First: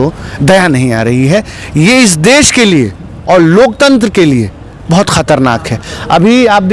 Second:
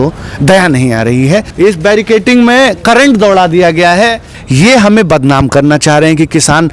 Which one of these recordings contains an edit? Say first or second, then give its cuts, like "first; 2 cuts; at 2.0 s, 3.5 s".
second; 2 cuts; at 1.5 s, 4.3 s